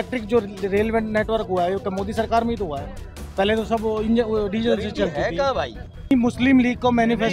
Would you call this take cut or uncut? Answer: cut